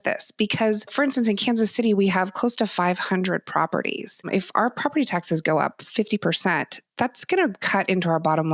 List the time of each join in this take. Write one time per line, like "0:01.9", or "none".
0:00.9
0:04.3